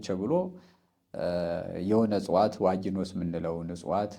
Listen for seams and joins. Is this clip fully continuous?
yes; 0 cuts

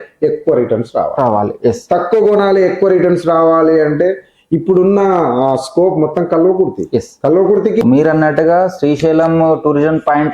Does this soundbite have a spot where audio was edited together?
yes; 1 cut; at 7.8 s

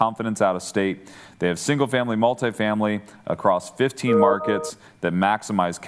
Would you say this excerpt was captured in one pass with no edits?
yes; 0 cuts

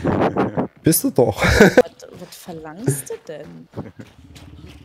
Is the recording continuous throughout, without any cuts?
no; 1 cut; at 1.8 s

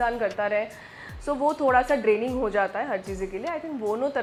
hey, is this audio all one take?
yes; 0 cuts

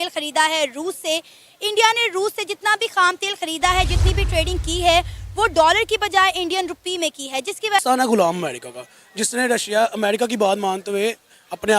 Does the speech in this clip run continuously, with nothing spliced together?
no; 1 cut; at 7.8 s

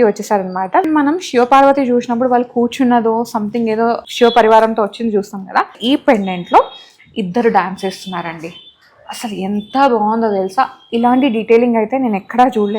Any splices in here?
yes; 3 cuts; at 0.8 s, 4.1 s, 5.8 s

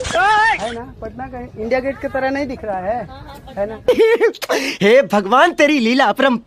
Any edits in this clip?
no; 0 cuts

